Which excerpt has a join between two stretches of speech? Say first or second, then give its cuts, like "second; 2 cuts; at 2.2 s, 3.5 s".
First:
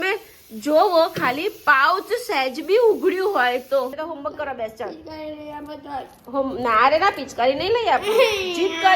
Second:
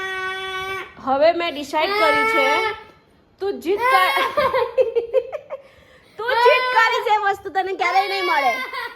first; 1 cut; at 4.0 s